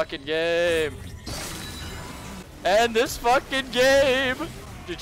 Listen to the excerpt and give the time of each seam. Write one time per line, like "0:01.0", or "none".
0:02.5